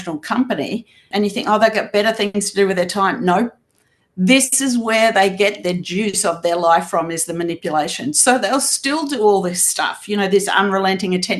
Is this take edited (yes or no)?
yes